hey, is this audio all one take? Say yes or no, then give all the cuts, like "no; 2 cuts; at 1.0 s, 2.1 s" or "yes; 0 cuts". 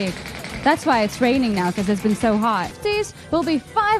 no; 1 cut; at 2.8 s